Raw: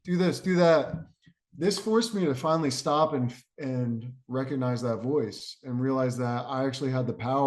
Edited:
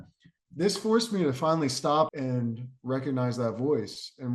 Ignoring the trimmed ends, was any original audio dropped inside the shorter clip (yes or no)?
yes